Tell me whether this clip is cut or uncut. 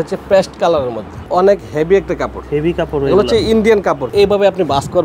cut